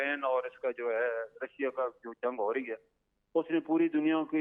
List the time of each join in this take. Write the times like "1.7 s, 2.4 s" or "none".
none